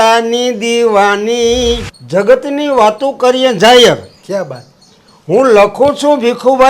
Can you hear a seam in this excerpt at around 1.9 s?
yes; 1 cut; at 1.9 s

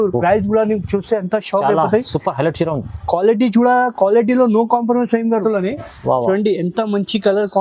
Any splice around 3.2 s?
no; 1 cut; at 5.4 s

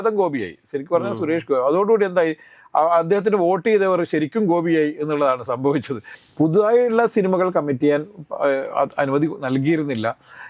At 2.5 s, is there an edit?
no; 1 cut; at 6.1 s

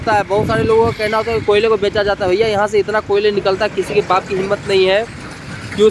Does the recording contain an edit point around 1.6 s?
no; 0 cuts

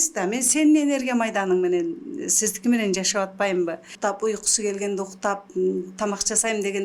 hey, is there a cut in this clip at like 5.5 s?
no; 1 cut; at 3.9 s

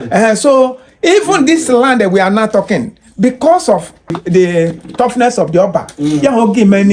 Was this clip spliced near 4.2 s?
yes; 1 cut; at 4.2 s

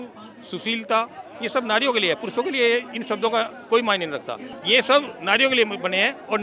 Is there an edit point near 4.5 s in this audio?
yes; 1 cut; at 4.5 s

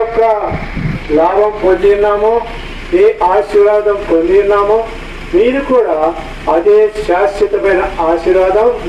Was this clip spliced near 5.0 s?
no; 0 cuts

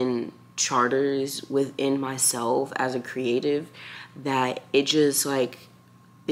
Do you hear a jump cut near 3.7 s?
no; 0 cuts

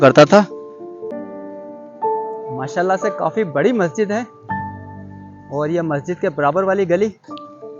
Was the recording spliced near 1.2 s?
yes; 1 cut; at 1.2 s

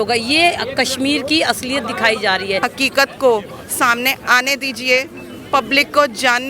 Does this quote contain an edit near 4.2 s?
no; 1 cut; at 2.6 s

